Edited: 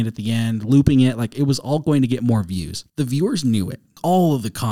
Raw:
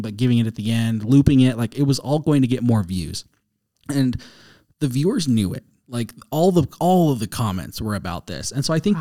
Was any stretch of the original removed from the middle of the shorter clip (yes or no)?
yes